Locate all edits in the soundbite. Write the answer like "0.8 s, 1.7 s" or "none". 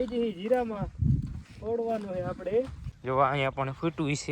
2.9 s